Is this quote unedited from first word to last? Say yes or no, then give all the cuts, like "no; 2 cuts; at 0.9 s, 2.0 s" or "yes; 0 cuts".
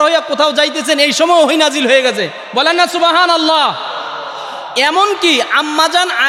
yes; 0 cuts